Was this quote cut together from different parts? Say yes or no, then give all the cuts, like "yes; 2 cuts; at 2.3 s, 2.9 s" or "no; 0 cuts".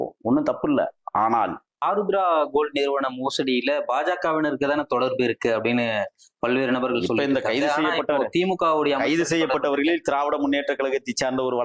yes; 1 cut; at 1.8 s